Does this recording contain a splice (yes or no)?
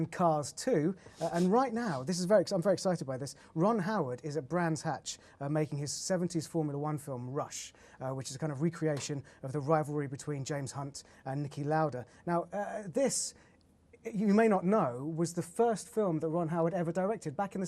yes